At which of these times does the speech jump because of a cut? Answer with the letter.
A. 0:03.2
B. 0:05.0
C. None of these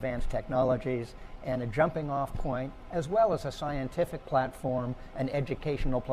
B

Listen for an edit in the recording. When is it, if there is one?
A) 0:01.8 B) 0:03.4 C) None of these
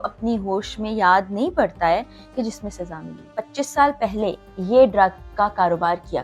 B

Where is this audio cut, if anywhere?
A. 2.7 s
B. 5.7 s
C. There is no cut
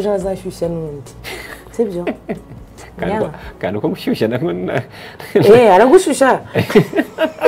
C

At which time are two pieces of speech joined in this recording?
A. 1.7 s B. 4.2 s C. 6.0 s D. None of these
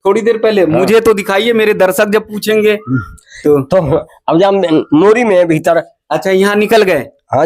D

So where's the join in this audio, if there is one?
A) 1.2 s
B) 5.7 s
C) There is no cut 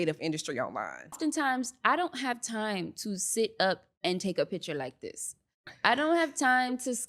A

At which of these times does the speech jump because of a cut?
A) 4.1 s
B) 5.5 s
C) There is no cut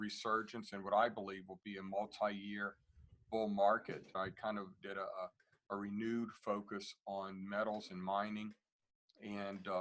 A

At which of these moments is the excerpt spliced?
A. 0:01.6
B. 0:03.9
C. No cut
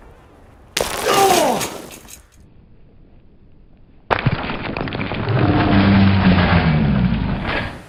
C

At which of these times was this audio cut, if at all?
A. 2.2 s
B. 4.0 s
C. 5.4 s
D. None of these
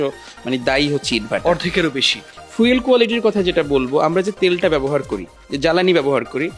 A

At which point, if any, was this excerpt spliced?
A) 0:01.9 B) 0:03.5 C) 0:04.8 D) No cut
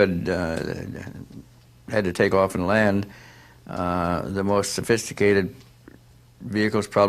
C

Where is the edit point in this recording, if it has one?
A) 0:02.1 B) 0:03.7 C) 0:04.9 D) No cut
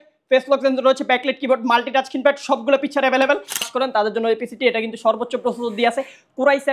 B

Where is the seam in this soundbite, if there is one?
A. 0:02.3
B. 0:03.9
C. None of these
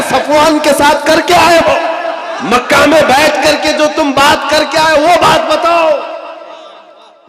A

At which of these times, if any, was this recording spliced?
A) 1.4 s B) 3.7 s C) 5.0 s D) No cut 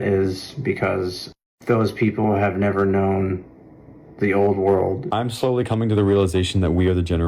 C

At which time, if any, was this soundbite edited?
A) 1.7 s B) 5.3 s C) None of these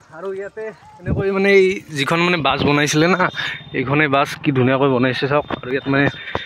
C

